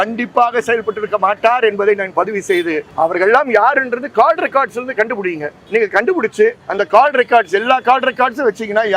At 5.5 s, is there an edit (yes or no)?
yes